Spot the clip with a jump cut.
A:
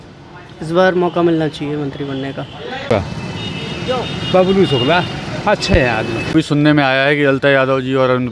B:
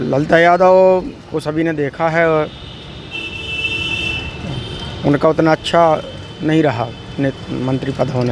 A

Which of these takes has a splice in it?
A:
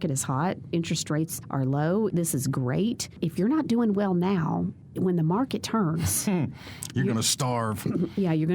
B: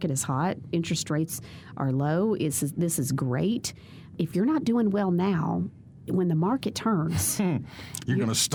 A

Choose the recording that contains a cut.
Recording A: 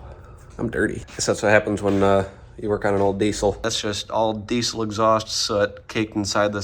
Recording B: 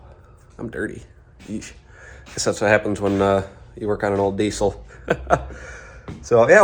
A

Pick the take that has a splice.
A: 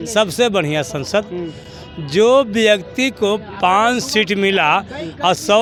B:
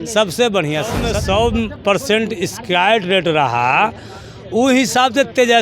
B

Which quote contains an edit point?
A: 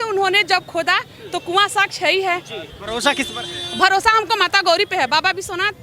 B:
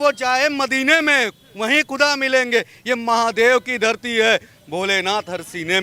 A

